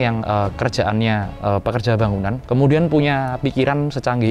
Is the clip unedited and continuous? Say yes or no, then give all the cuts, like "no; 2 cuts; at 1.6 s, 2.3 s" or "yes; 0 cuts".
no; 2 cuts; at 1.3 s, 2.4 s